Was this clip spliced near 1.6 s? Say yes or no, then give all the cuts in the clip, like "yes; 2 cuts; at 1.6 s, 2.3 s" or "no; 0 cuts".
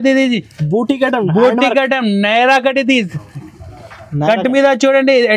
no; 0 cuts